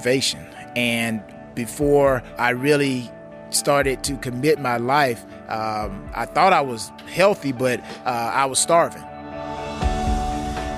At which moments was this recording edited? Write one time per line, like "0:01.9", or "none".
0:01.3
0:02.3
0:09.0